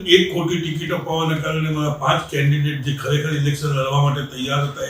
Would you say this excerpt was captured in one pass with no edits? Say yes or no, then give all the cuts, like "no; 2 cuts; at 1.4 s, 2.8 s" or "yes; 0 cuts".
yes; 0 cuts